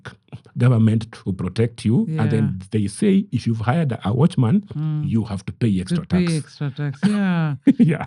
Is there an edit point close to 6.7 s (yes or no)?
no